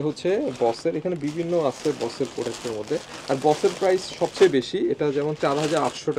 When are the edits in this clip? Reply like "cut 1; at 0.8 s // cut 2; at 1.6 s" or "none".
none